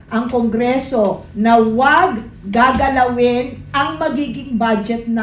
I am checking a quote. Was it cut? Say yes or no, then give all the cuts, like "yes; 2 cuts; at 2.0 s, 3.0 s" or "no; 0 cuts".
no; 0 cuts